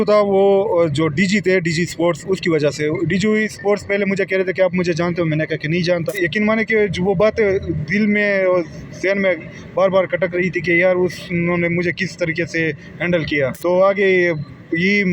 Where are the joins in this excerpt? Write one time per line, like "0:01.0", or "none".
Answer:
0:06.1
0:13.6

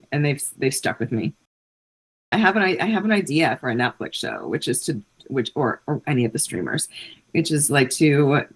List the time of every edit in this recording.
0:02.1

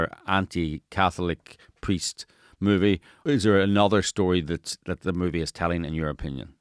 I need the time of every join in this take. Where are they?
0:03.1

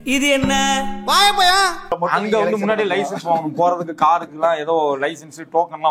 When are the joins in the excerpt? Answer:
0:01.9

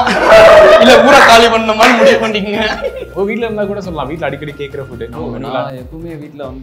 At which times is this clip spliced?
0:03.0

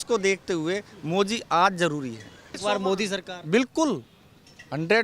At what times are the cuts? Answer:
0:02.6

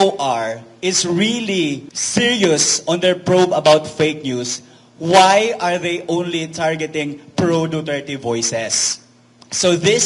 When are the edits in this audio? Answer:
0:01.9

